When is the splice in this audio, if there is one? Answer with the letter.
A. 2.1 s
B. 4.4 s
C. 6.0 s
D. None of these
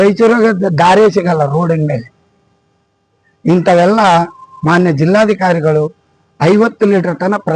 D